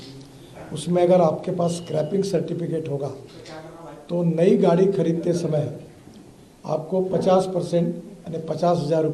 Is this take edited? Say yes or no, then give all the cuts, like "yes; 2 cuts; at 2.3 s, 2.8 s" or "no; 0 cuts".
no; 0 cuts